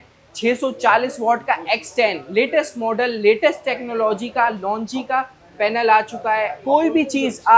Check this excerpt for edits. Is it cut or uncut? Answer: cut